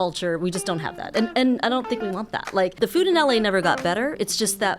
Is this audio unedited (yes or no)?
no